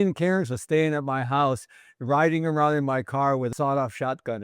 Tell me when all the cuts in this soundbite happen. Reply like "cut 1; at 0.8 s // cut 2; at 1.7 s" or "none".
cut 1; at 3.5 s

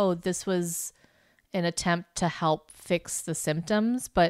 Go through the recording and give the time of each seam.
none

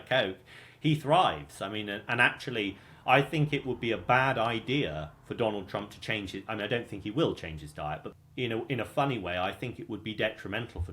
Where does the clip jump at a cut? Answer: cut 1; at 8.1 s

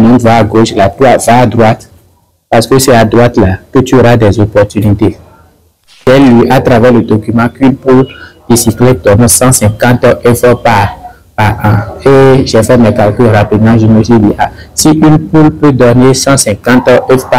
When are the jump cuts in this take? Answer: cut 1; at 6.0 s

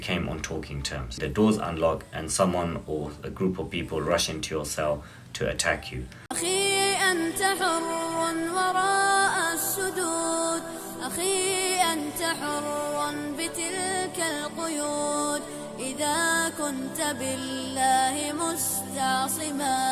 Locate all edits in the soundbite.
cut 1; at 1.2 s // cut 2; at 6.2 s

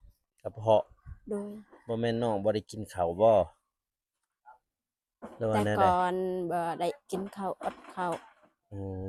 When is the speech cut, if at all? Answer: none

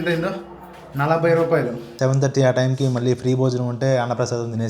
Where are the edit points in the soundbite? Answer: cut 1; at 1.8 s

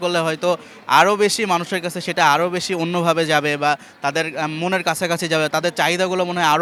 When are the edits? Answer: none

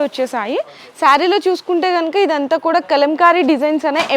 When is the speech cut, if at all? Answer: none

